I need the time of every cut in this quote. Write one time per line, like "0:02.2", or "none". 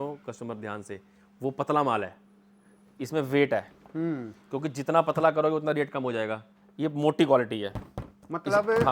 none